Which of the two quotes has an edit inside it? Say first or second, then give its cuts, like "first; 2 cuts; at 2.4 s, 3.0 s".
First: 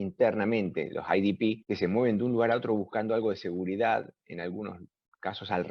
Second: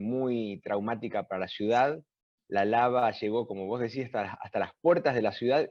first; 1 cut; at 1.6 s